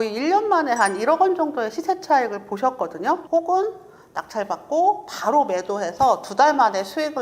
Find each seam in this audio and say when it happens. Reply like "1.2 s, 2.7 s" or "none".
3.2 s